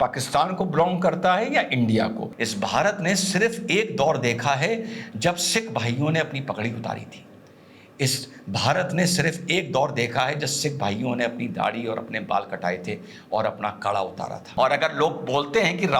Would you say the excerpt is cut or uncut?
cut